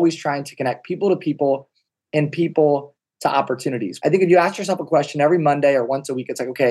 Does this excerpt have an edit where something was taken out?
yes; 1 cut; at 3.9 s

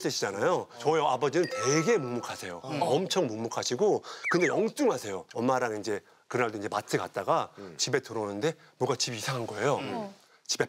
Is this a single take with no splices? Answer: no; 1 cut; at 5.2 s

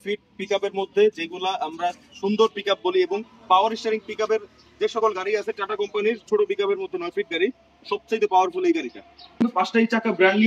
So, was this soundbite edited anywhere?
yes; 1 cut; at 9.4 s

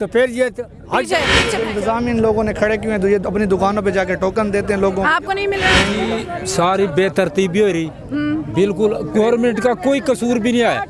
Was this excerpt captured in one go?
no; 2 cuts; at 1.6 s, 6.0 s

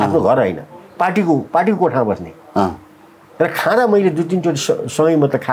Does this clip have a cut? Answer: no; 0 cuts

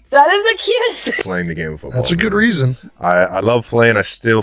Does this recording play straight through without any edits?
no; 1 cut; at 1.0 s

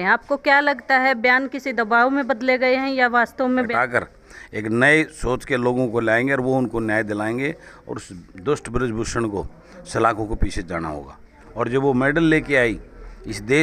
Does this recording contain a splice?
yes; 2 cuts; at 3.7 s, 11.4 s

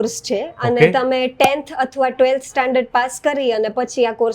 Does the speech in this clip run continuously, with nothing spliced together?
yes; 0 cuts

